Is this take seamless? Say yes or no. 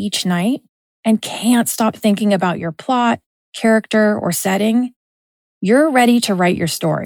yes